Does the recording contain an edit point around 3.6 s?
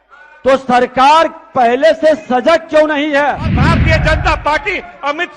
yes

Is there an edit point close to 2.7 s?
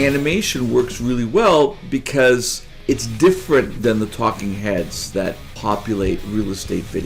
yes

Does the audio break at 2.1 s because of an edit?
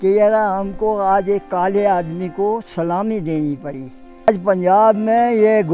no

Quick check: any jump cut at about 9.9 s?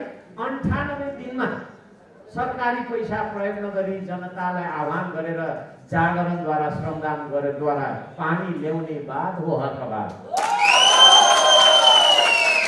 no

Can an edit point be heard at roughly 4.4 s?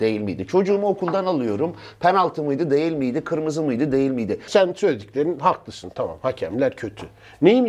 yes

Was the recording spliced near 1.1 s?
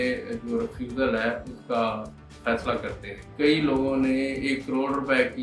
no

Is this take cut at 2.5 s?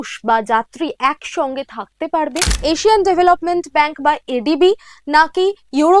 yes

